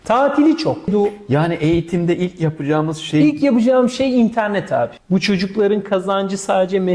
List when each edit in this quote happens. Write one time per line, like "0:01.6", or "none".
0:00.9
0:05.0